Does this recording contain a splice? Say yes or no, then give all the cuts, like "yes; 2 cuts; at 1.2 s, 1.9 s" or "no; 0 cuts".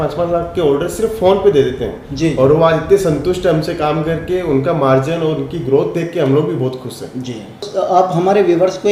no; 0 cuts